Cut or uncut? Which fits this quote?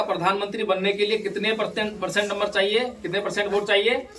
uncut